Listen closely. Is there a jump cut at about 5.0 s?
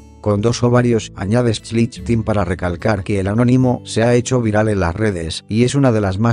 no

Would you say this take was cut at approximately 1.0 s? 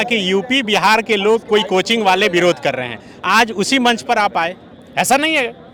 no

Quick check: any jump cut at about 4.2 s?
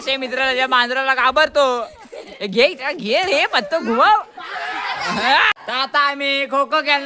no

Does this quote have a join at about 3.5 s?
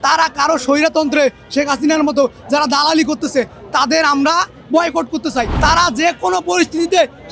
no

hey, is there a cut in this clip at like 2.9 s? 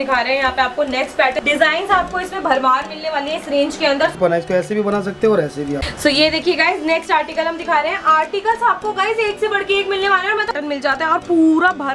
no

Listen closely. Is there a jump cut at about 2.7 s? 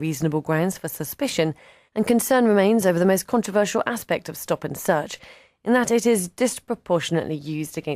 no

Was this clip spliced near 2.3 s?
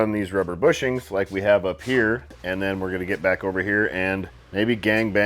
yes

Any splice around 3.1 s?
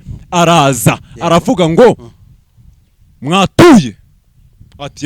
no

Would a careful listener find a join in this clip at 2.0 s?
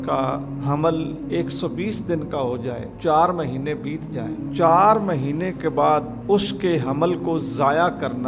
no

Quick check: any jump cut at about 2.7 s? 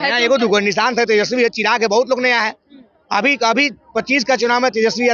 no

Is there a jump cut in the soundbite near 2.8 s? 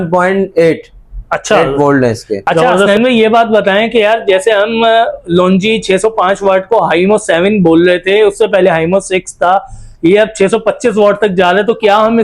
yes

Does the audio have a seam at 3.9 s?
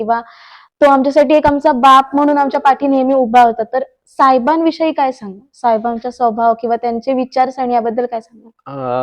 no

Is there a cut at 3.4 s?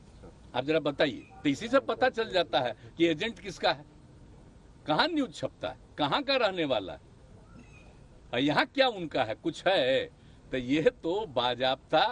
no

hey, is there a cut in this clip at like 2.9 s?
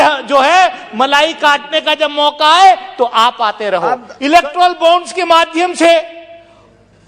no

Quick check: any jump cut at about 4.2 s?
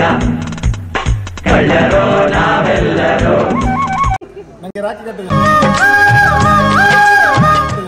yes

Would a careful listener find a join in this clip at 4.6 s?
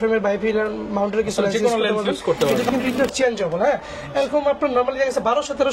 no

